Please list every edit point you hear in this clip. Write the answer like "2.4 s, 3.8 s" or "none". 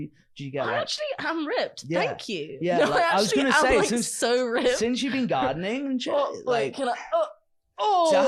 none